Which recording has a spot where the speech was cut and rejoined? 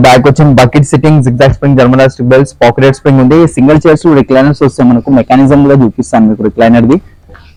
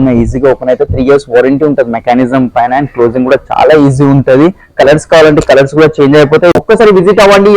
second; 1 cut; at 6.7 s

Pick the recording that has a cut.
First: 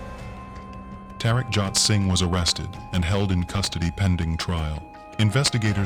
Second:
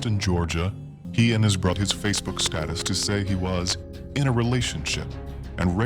second; 2 cuts; at 1.0 s, 1.8 s

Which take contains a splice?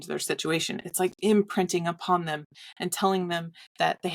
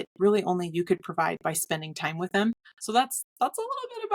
second; 1 cut; at 2.7 s

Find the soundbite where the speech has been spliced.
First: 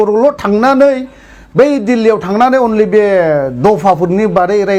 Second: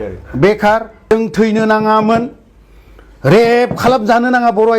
second; 1 cut; at 1.1 s

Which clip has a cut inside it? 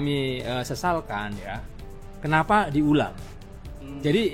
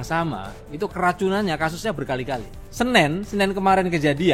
second; 1 cut; at 2.6 s

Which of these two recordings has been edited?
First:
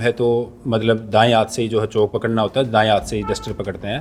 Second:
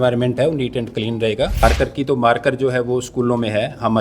second; 1 cut; at 1.6 s

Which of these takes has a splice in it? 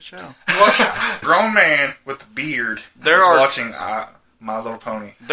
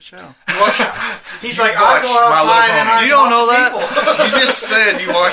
first; 1 cut; at 1.2 s

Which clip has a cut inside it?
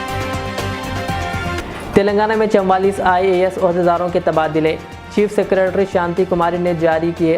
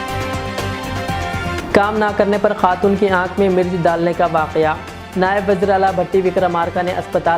first; 1 cut; at 1.6 s

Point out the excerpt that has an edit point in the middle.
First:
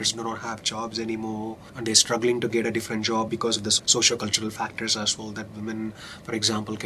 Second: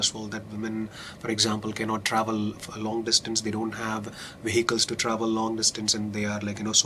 first; 2 cuts; at 1.7 s, 3.5 s

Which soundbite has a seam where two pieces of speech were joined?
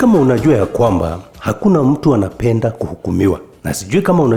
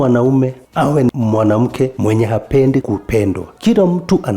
second; 2 cuts; at 1.1 s, 3.0 s

